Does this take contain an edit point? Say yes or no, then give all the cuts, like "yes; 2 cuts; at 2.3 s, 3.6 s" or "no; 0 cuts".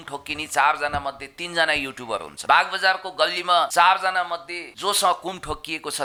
no; 0 cuts